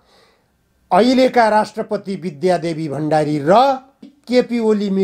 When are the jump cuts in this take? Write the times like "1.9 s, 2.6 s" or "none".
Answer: none